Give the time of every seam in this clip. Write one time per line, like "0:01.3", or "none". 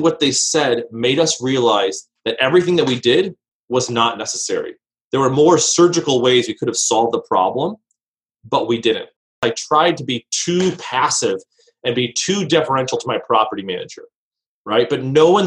0:09.4